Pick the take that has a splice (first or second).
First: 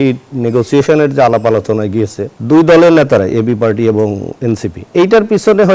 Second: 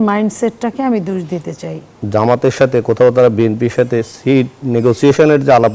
second